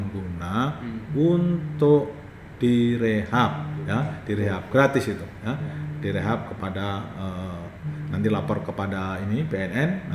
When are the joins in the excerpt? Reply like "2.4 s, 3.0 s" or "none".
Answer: none